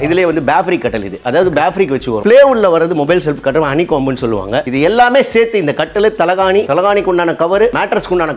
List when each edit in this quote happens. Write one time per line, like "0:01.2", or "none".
0:02.2
0:04.7